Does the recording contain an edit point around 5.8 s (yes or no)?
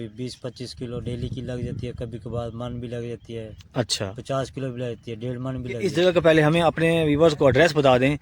yes